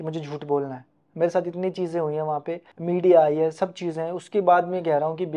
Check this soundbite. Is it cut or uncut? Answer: uncut